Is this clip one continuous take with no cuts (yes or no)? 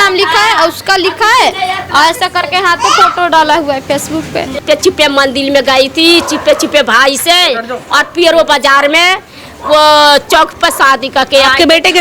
yes